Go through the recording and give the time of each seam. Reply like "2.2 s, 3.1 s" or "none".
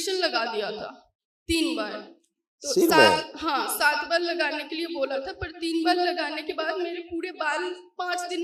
none